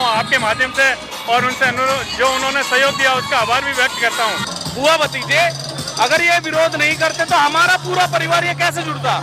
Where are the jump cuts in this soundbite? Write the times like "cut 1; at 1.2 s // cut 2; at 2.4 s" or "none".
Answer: cut 1; at 4.5 s